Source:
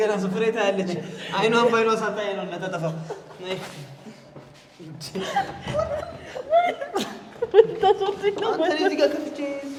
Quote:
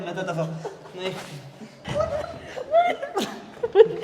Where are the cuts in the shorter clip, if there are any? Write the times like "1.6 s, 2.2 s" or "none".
1.8 s